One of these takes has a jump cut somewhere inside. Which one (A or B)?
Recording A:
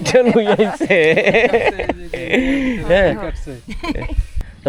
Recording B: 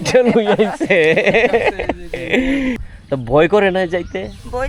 B